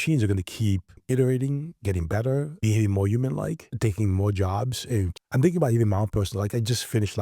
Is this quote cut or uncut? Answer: cut